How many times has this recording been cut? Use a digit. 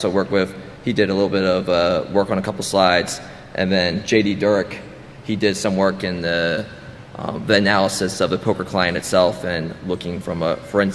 0